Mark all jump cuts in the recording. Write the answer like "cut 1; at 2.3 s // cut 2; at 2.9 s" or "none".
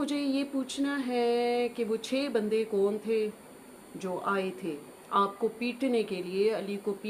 none